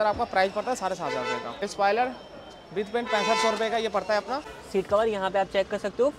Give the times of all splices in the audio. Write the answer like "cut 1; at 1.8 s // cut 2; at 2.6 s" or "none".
cut 1; at 1.5 s // cut 2; at 4.5 s